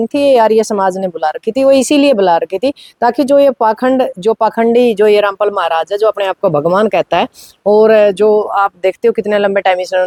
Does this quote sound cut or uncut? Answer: uncut